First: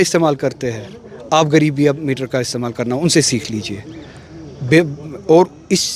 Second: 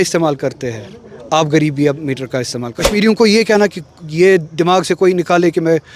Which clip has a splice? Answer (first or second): second